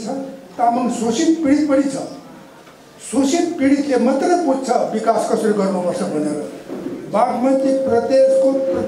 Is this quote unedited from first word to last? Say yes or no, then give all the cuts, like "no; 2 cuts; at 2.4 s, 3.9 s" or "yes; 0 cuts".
no; 1 cut; at 6.3 s